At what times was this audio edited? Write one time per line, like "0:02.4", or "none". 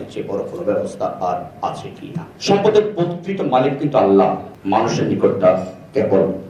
0:02.3